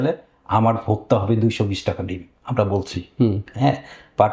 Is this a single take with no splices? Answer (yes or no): yes